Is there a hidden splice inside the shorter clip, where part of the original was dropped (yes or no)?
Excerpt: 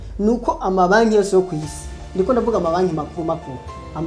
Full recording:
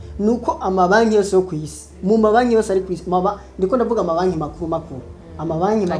yes